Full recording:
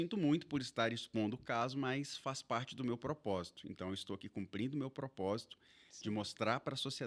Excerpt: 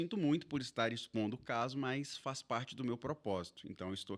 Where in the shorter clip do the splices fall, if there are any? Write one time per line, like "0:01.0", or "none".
none

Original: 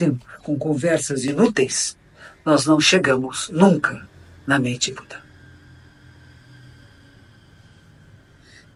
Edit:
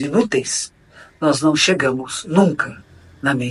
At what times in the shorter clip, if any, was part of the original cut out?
none

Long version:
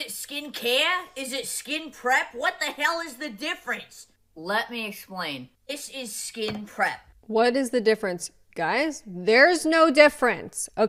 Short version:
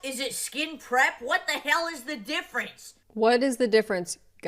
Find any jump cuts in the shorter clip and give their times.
0:03.0

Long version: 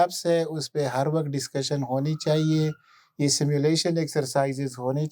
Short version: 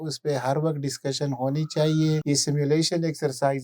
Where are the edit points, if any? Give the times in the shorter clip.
0:02.2

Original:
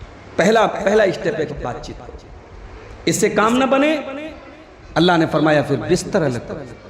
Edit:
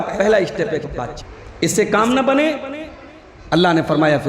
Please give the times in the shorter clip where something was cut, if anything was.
0:01.7

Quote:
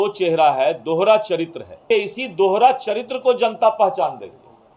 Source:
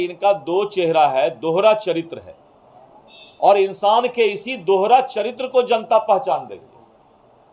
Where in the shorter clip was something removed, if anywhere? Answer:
0:01.8

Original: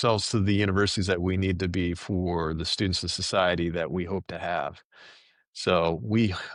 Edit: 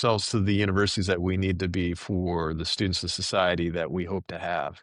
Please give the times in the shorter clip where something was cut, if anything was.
none

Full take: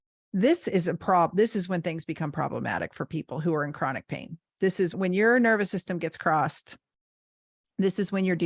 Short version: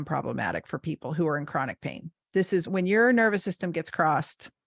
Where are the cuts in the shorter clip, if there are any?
none

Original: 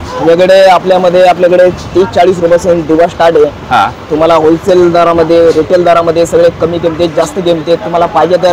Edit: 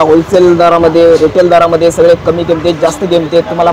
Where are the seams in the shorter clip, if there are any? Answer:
none

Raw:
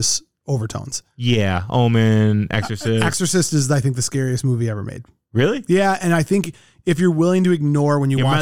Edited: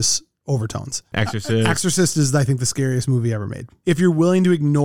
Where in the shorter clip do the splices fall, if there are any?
0:01.1
0:03.6

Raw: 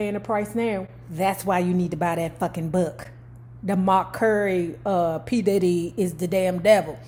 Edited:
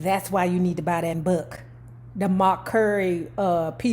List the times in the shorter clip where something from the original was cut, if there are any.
0:01.2

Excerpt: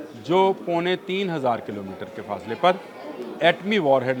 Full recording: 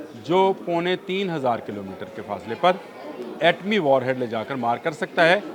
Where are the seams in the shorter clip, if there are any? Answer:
none

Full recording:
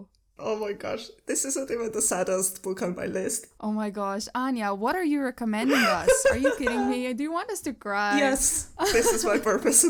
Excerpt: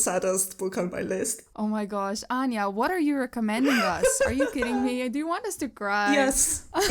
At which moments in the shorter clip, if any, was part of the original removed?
none

